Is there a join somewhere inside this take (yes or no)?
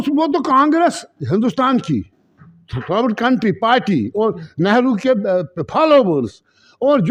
no